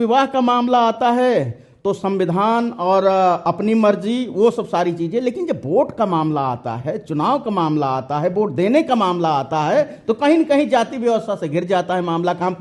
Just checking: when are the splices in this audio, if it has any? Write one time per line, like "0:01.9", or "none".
none